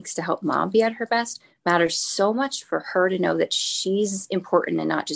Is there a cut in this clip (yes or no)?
no